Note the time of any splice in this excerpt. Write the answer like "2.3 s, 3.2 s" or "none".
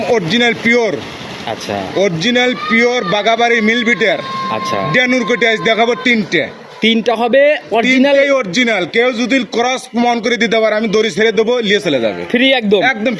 none